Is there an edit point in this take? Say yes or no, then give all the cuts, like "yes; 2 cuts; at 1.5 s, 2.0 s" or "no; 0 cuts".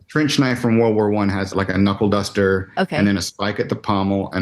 yes; 1 cut; at 1.4 s